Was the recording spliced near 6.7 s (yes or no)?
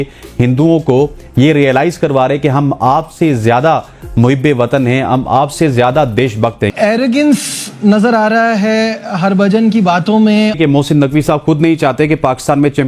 yes